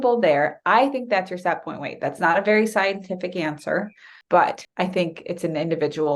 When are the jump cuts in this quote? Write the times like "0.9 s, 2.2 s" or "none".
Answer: 4.1 s, 4.6 s